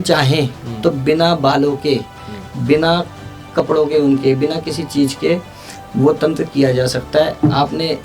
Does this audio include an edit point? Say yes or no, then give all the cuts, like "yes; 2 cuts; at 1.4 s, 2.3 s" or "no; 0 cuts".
no; 0 cuts